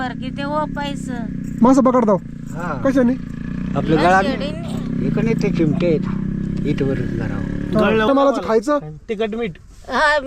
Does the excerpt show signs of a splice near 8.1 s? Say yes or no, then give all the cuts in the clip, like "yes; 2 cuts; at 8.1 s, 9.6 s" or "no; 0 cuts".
yes; 1 cut; at 8.1 s